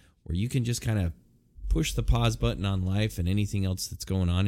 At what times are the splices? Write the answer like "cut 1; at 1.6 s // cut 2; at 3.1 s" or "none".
none